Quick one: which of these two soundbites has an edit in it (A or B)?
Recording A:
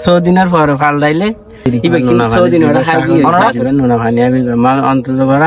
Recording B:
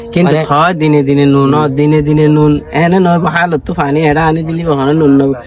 A